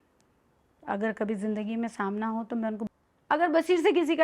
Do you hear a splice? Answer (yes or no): yes